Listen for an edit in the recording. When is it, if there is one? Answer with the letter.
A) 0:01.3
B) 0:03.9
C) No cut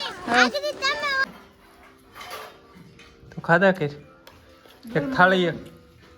A